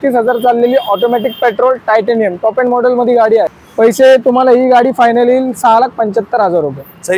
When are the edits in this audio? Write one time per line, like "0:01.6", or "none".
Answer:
none

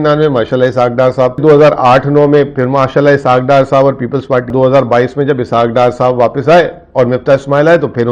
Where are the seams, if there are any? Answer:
0:01.4
0:04.5

